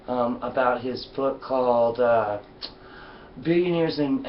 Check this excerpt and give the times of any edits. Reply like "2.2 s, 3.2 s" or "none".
1.7 s